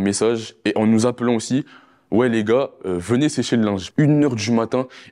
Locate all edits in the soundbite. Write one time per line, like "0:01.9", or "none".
0:03.8